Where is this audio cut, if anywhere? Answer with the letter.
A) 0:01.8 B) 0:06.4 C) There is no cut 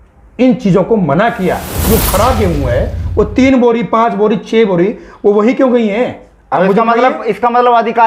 A